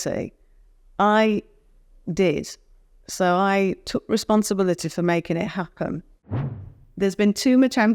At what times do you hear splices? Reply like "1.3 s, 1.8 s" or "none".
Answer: 6.3 s